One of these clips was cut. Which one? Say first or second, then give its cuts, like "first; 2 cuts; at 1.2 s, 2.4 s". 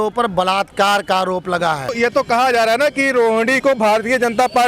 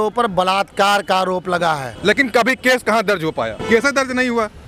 first; 1 cut; at 2.0 s